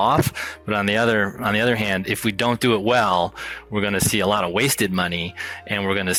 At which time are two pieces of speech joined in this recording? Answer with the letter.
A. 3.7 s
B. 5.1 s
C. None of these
C